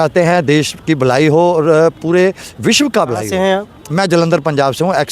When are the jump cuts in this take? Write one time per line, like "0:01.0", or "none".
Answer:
0:03.3

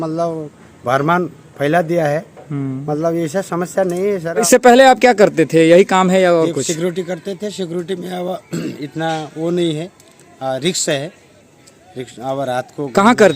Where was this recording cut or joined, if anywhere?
0:04.4

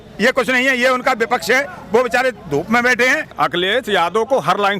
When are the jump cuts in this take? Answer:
0:03.3

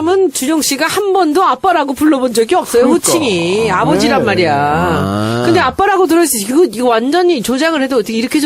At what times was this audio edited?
none

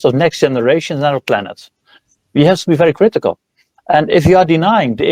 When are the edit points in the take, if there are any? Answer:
none

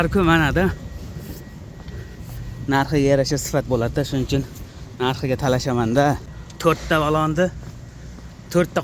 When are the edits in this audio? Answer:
none

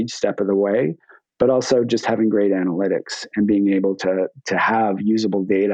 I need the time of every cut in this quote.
none

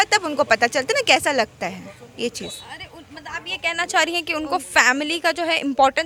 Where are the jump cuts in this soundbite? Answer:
none

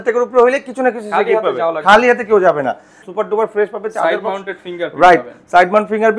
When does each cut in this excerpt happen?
0:03.0

